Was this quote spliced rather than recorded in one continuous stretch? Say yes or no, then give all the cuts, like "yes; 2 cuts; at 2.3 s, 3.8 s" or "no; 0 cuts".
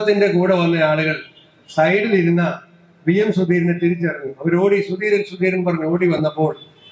no; 0 cuts